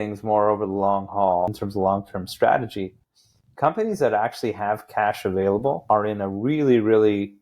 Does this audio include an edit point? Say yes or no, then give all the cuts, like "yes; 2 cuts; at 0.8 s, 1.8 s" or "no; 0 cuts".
yes; 2 cuts; at 1.5 s, 5.8 s